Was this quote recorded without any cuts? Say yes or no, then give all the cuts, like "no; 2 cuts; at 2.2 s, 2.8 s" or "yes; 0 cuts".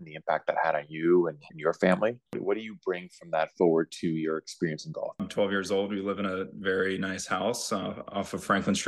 no; 2 cuts; at 2.4 s, 5.2 s